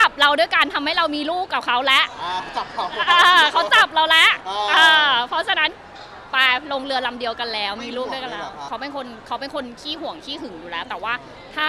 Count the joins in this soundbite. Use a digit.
1